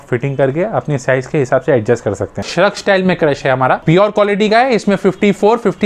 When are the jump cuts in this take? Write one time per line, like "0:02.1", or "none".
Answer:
0:02.5
0:03.8